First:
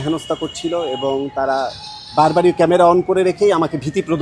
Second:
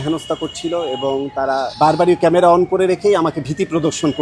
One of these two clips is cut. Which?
second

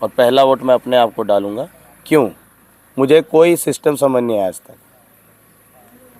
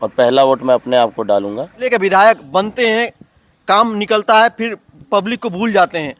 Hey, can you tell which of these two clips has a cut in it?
second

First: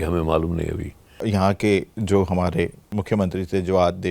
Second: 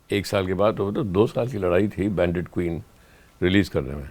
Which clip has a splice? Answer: first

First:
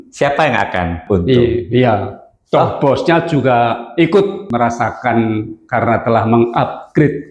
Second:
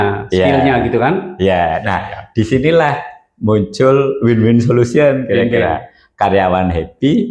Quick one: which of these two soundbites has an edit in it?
first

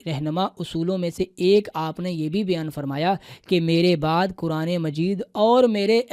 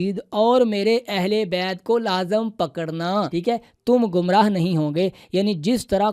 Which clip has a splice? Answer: second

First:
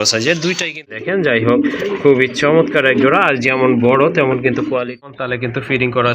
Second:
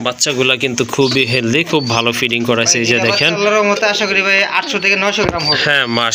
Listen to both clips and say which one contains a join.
first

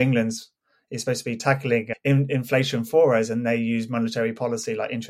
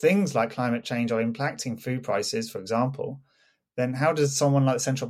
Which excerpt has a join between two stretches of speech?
first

